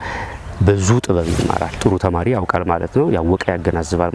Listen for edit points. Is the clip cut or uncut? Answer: cut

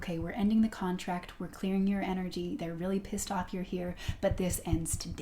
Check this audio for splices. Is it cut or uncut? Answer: uncut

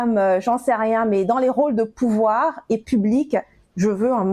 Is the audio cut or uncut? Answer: uncut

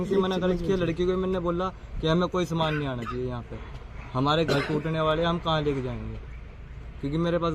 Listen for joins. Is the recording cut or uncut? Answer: uncut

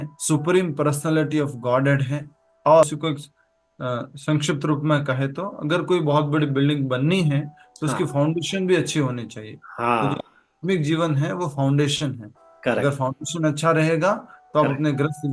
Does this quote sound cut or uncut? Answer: cut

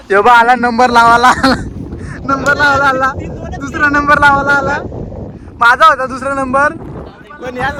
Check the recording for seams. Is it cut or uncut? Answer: uncut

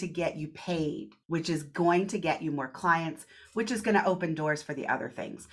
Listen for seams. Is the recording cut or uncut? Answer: cut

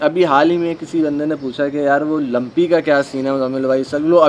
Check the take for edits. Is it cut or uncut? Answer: uncut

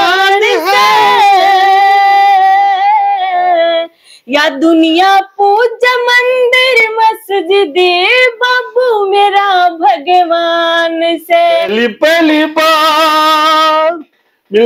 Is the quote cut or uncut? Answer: cut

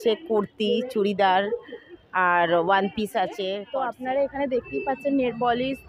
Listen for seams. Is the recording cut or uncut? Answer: cut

